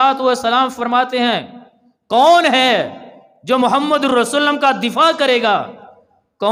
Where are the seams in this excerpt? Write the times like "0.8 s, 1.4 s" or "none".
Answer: none